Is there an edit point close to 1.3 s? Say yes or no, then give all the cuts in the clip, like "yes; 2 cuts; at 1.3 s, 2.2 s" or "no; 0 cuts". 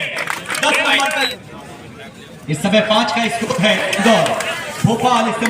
yes; 1 cut; at 1.3 s